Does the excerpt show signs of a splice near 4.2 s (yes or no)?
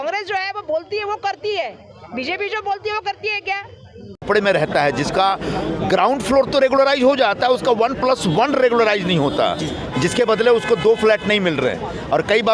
yes